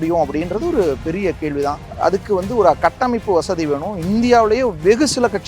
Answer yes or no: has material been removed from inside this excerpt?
yes